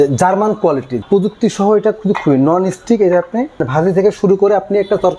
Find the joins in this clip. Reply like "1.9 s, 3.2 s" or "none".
1.0 s, 3.6 s